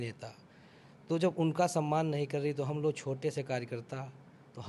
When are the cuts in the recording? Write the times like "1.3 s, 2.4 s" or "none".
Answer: none